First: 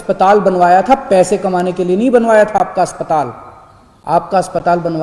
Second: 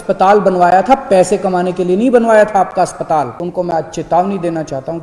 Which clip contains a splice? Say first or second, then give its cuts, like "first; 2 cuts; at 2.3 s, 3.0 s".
second; 1 cut; at 3.4 s